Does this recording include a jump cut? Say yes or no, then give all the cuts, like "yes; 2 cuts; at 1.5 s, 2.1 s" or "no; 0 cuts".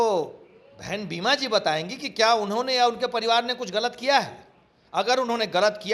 no; 0 cuts